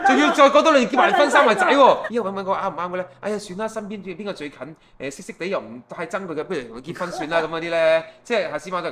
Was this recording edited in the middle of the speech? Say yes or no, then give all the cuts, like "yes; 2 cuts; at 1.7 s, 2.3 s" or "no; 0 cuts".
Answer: yes; 1 cut; at 2.1 s